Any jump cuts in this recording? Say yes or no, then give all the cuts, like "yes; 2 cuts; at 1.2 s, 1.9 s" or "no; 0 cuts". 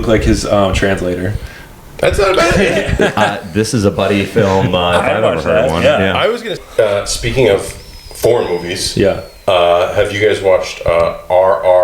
yes; 1 cut; at 6.6 s